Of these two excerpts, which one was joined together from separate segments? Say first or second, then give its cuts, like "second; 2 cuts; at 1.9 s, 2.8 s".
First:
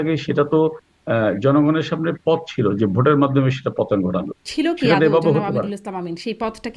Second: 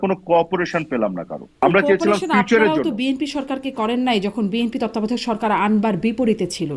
second; 1 cut; at 1.5 s